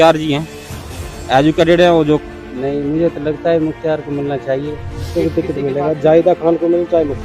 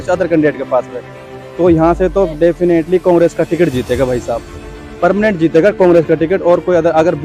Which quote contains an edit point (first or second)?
first